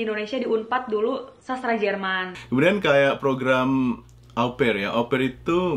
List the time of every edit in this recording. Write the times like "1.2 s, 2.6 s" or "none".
2.3 s